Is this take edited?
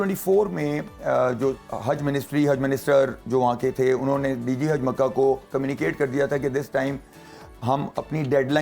no; 0 cuts

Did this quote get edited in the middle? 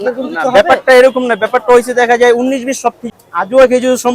yes; 1 cut; at 3.1 s

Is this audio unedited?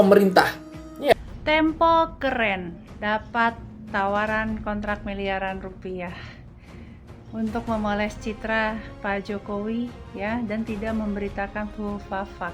no; 1 cut; at 1.1 s

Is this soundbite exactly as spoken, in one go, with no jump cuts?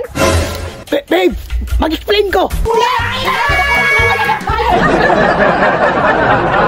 no; 2 cuts; at 2.6 s, 4.7 s

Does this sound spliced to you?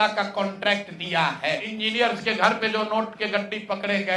yes; 1 cut; at 1.7 s

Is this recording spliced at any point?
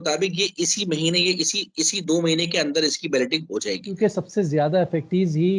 yes; 1 cut; at 3.9 s

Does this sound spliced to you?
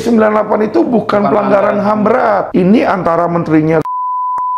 yes; 1 cut; at 2.5 s

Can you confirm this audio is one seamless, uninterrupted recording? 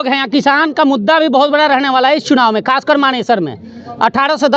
yes; 0 cuts

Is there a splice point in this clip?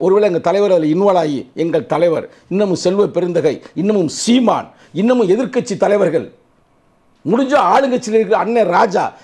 no; 0 cuts

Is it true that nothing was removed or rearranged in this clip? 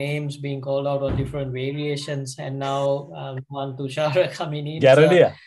yes; 0 cuts

